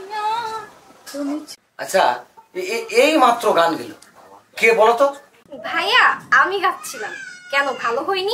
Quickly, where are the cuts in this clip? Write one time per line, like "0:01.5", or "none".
0:01.5

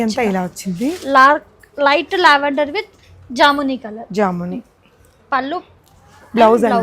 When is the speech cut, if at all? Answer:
none

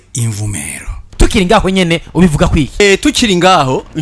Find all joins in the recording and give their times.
0:02.8

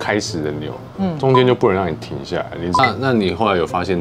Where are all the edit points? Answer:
0:02.6

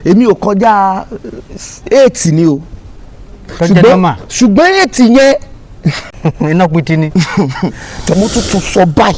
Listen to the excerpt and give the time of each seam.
0:06.0
0:08.1

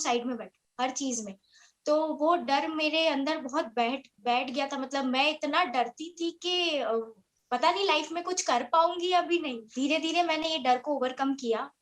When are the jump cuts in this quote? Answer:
0:09.6

